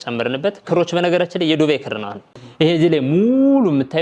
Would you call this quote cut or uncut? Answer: cut